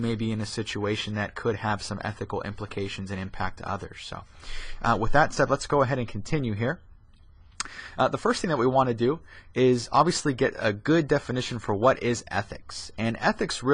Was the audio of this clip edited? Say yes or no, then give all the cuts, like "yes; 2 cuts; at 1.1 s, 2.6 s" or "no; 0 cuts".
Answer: yes; 1 cut; at 10.8 s